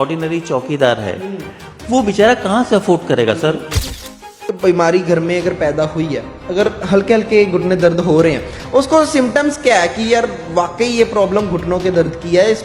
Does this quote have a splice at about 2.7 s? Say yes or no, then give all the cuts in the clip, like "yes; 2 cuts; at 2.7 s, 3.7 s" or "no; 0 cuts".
no; 1 cut; at 4.2 s